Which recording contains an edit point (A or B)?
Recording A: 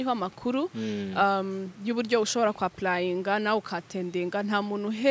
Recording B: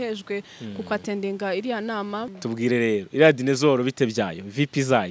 B